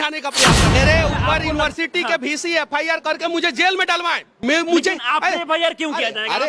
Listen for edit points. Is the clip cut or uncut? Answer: cut